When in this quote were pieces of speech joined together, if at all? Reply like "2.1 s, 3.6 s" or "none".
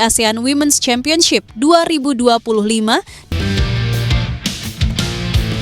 3.2 s